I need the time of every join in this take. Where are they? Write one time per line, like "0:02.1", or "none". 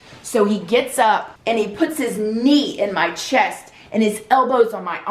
0:01.3